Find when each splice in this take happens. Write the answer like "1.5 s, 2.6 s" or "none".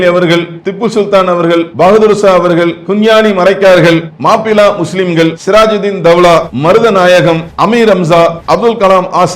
1.7 s, 2.8 s, 4.1 s, 5.4 s, 6.5 s, 7.5 s, 8.4 s